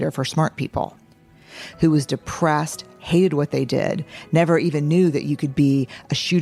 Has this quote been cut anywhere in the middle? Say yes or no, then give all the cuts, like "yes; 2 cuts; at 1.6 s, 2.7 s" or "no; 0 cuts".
no; 0 cuts